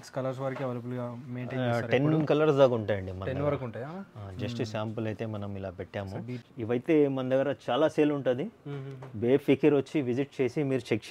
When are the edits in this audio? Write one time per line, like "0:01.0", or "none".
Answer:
0:06.4